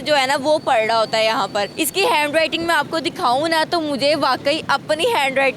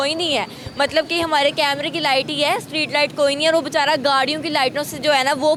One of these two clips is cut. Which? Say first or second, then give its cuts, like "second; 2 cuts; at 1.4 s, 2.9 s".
first; 1 cut; at 1.8 s